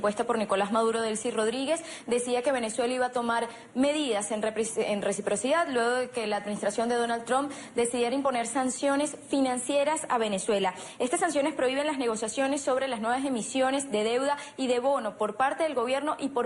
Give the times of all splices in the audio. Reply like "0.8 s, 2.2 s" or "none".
9.8 s